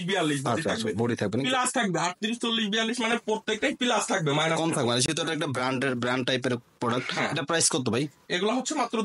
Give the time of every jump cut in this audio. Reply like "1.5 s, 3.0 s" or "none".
none